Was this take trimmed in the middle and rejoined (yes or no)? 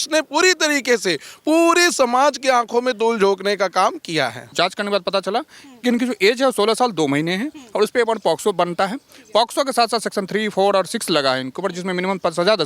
yes